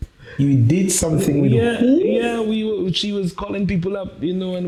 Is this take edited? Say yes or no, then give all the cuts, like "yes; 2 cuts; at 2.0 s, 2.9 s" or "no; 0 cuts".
no; 0 cuts